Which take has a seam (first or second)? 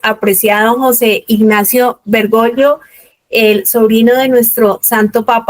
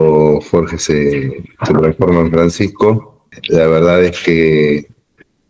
second